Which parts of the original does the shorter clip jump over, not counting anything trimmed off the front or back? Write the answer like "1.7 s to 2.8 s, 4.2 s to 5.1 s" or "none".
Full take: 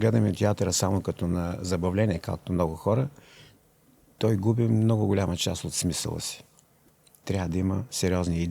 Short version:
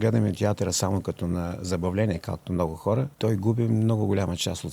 3.1 s to 4.1 s